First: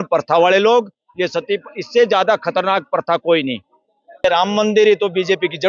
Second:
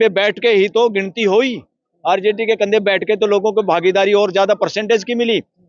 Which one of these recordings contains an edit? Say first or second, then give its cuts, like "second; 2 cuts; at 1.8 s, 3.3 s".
first; 1 cut; at 4.2 s